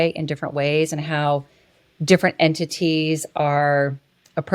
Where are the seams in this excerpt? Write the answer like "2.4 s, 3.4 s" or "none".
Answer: none